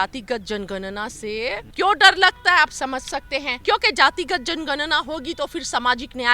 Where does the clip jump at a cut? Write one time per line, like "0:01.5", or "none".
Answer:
0:01.7
0:03.5